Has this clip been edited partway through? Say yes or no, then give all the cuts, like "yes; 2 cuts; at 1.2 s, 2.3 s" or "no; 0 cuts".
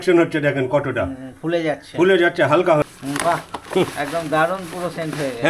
yes; 1 cut; at 2.9 s